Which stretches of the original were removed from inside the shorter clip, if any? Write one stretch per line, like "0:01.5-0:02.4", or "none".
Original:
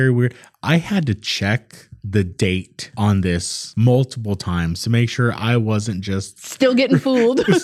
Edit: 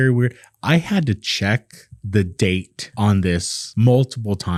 none